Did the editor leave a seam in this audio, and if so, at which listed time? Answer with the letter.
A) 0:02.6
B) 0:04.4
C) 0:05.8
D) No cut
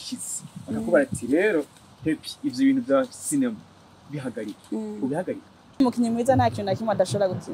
C